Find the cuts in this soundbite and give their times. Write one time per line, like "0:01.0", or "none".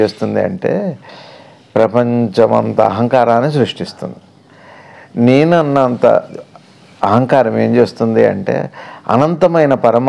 none

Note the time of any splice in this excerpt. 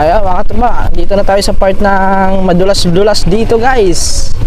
none

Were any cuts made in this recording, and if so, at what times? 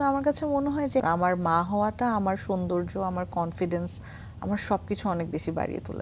0:01.0

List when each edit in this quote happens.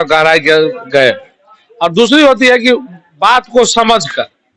none

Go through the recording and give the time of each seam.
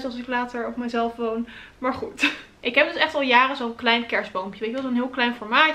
none

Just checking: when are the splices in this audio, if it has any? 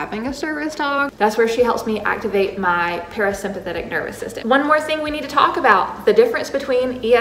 0:01.1
0:04.3

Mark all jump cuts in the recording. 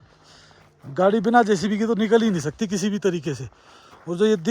none

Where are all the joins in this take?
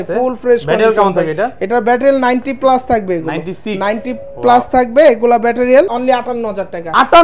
0:05.9

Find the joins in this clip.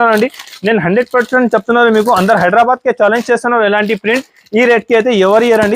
none

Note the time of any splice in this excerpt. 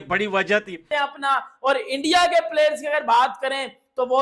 0:00.9

